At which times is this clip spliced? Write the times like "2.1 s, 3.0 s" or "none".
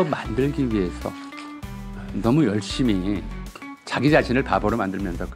none